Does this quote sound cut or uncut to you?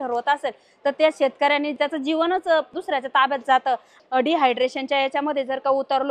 cut